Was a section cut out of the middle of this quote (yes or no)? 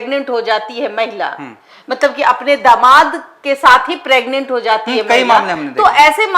no